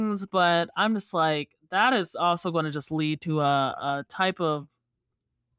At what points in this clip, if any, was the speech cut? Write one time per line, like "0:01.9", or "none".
none